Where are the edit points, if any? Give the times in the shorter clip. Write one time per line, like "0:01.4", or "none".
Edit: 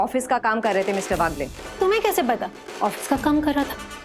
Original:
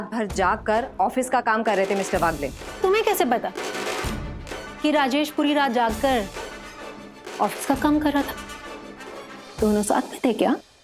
0:02.6